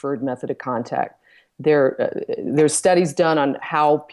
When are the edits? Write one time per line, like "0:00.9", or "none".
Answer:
none